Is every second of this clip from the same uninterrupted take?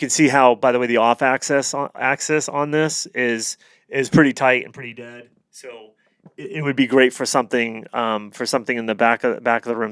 yes; 0 cuts

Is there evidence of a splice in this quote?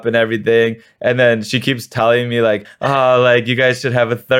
yes; 1 cut; at 2.7 s

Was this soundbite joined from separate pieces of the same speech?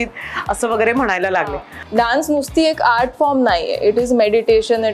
yes; 1 cut; at 1.7 s

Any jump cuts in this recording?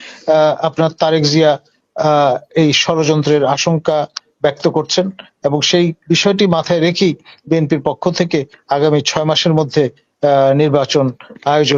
no; 0 cuts

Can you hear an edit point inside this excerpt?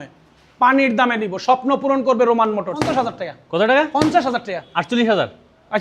yes; 1 cut; at 2.9 s

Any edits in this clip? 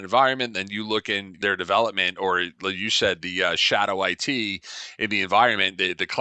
yes; 1 cut; at 1.4 s

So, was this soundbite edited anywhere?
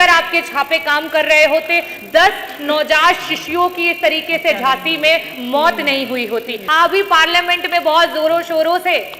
yes; 1 cut; at 6.6 s

